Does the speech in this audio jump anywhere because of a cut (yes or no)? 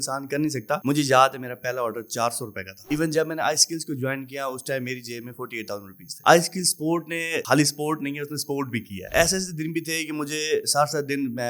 yes